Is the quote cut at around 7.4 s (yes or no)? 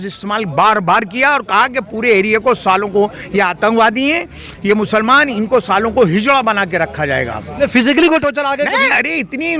yes